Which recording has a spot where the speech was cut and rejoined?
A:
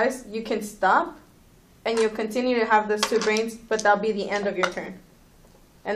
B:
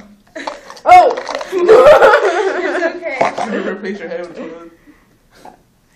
B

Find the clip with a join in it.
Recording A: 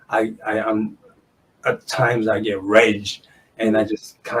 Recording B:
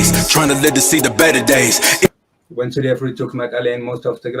B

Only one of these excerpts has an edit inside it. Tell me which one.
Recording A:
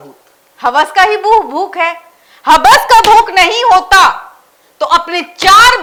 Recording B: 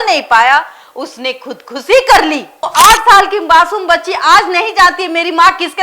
B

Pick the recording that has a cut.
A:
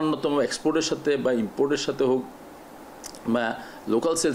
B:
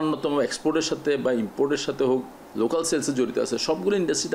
B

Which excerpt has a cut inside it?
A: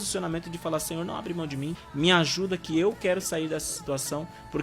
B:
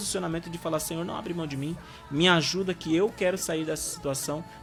A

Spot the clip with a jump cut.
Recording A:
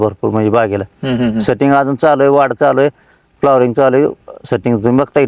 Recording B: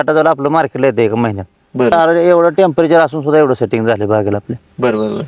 B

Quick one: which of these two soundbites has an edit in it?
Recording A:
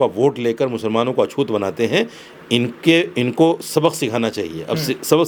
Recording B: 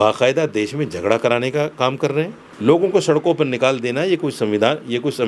B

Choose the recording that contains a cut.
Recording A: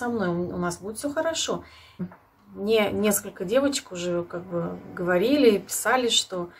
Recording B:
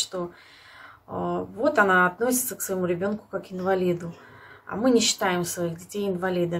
A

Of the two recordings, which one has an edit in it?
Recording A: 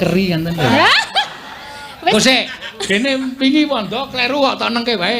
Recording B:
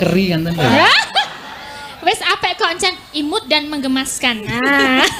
A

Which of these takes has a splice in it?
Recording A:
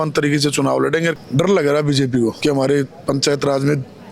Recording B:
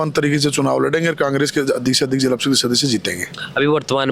A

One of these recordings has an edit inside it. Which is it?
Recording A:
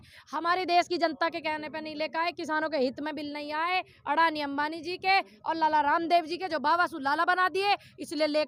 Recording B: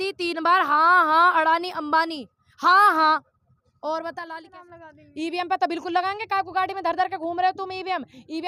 B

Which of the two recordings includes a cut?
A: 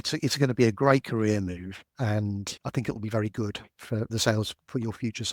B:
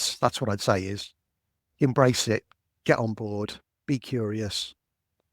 A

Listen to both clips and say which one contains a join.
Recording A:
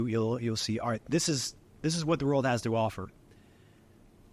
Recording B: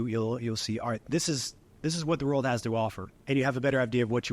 B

